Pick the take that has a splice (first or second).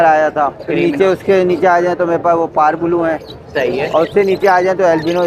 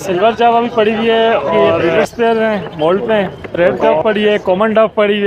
second